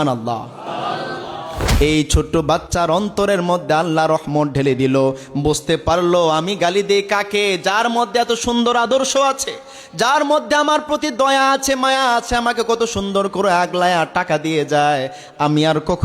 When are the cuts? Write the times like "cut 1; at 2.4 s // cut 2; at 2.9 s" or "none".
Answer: cut 1; at 1.6 s